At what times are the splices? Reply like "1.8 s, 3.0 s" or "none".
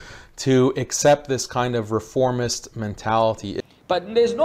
3.5 s